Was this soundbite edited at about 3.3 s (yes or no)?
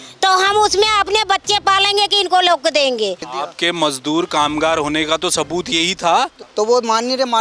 yes